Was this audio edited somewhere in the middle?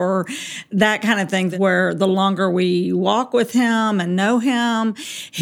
yes; 1 cut; at 1.5 s

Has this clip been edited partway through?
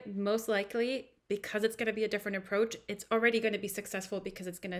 no; 0 cuts

